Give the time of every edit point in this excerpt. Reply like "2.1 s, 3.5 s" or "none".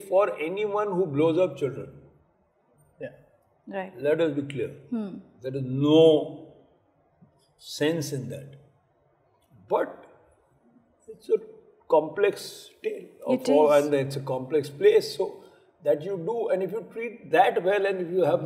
none